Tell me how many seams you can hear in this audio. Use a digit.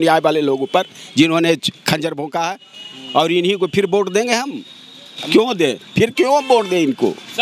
0